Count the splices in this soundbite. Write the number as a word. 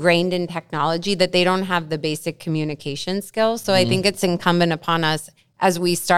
zero